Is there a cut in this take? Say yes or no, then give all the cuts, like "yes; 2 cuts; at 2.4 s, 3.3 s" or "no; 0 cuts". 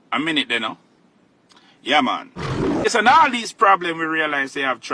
yes; 1 cut; at 2.7 s